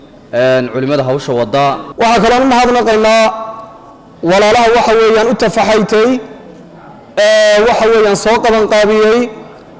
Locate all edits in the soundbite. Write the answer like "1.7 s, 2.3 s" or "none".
1.9 s